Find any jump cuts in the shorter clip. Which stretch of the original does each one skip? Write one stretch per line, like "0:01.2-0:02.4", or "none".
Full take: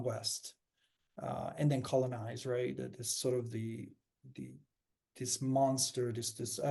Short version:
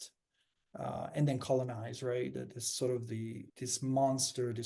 0:03.9-0:05.1